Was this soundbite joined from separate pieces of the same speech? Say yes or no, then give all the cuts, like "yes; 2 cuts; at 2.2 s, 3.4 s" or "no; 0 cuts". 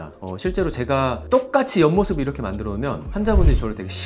no; 0 cuts